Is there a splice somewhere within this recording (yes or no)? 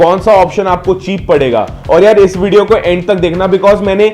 no